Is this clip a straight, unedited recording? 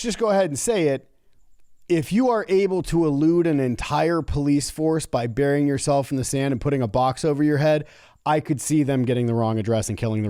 yes; 0 cuts

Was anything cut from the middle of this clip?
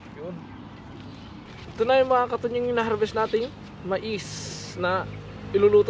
yes; 1 cut; at 1.5 s

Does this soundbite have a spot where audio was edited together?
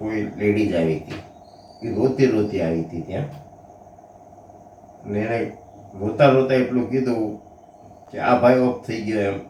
no; 0 cuts

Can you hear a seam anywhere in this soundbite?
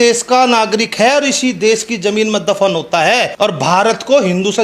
yes; 1 cut; at 3.3 s

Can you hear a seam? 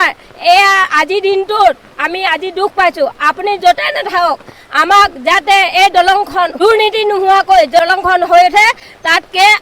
yes; 2 cuts; at 6.5 s, 7.8 s

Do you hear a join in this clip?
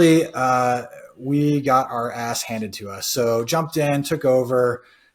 no; 0 cuts

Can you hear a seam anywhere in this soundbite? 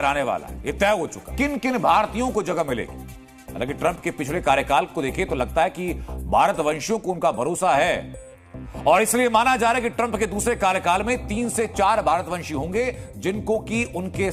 yes; 1 cut; at 1.3 s

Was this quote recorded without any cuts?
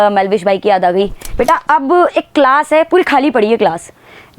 no; 1 cut; at 1.2 s

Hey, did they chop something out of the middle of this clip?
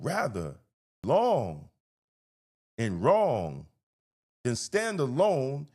yes; 1 cut; at 1.0 s

